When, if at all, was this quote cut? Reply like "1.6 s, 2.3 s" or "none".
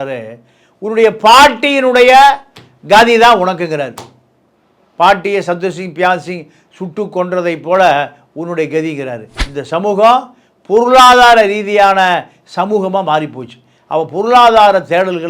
9.3 s